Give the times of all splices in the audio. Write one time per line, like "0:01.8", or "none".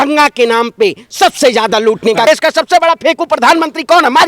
0:02.2

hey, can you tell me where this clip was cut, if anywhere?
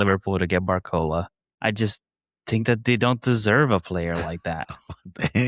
0:01.4

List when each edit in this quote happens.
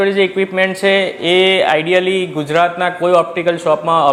none

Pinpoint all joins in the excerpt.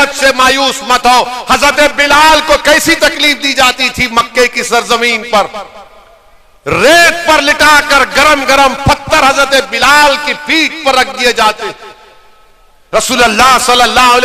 none

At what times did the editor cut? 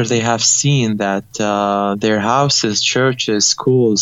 none

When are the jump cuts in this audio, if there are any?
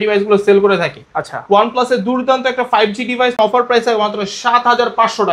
0:03.4

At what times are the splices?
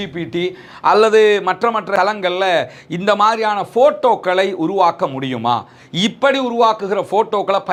none

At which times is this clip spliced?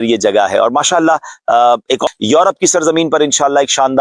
0:02.0

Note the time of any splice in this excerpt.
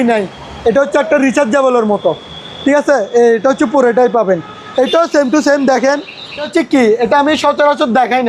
0:06.5

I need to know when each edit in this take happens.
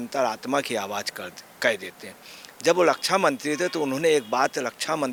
none

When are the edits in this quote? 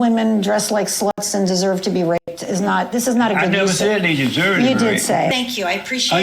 0:05.3

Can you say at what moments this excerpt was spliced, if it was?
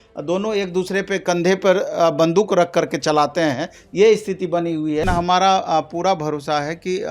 0:05.0

